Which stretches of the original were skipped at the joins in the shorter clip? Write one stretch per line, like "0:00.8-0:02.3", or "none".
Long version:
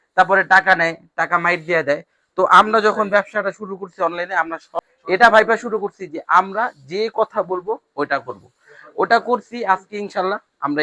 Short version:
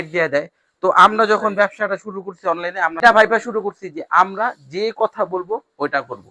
0:04.6-0:05.2